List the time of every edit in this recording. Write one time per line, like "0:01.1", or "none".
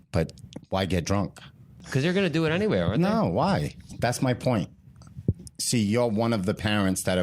0:01.8